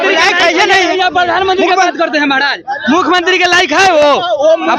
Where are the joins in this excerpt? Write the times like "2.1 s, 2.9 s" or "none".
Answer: none

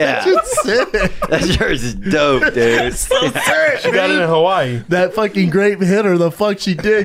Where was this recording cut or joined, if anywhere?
none

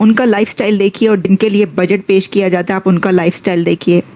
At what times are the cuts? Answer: none

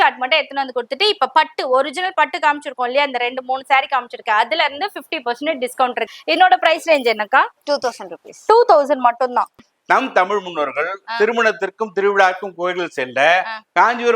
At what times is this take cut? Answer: 6.1 s, 9.6 s

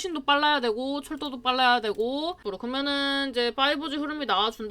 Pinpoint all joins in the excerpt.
2.5 s

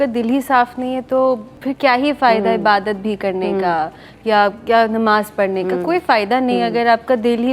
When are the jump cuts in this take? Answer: none

